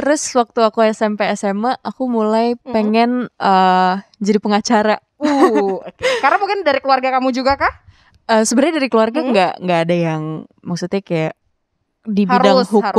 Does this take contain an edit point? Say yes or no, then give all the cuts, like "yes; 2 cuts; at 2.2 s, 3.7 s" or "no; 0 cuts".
no; 0 cuts